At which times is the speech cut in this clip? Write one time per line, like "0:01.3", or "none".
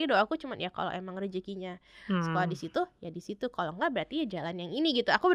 none